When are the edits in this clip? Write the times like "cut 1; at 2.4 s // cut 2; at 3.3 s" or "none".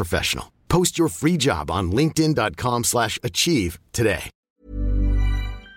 cut 1; at 4.4 s